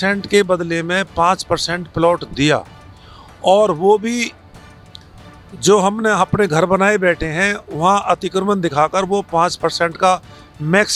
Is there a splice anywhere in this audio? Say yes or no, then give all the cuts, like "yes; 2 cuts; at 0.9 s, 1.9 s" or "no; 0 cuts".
no; 0 cuts